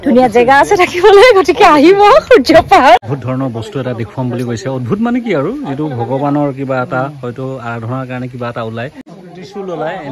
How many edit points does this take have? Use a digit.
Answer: 1